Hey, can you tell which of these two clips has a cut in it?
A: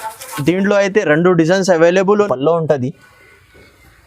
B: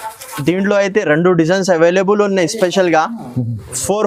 A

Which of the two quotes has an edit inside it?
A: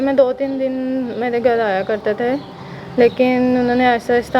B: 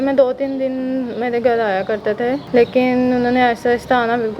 B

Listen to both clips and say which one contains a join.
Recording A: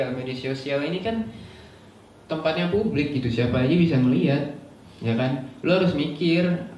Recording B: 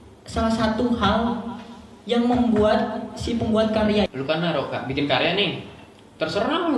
B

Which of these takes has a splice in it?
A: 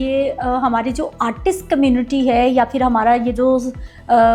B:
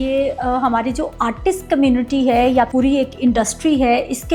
B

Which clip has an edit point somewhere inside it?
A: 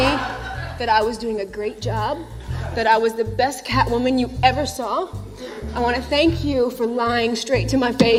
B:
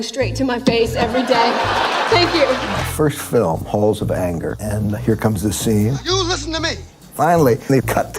B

